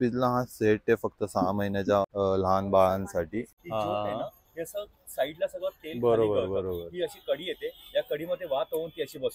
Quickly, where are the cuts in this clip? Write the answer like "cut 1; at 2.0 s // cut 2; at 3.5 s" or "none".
cut 1; at 2.1 s // cut 2; at 3.6 s